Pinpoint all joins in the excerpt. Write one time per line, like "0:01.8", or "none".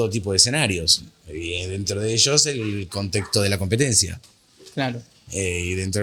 none